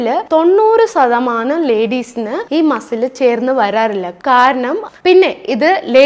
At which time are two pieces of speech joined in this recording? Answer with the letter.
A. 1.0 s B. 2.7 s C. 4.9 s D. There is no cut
C